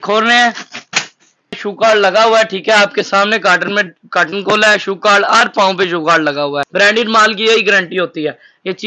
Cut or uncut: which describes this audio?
cut